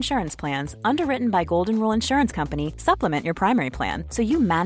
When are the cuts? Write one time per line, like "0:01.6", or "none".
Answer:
none